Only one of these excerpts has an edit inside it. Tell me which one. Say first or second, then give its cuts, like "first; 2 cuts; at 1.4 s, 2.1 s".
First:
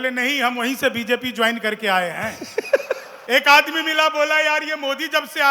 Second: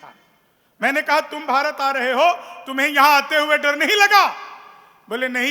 first; 1 cut; at 3.1 s